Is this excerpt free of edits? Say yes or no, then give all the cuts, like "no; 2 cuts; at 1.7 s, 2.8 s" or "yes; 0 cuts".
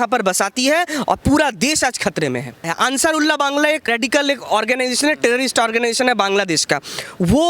no; 2 cuts; at 2.7 s, 3.9 s